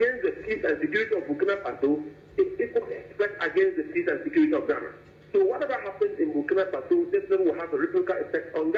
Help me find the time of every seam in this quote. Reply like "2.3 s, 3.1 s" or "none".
none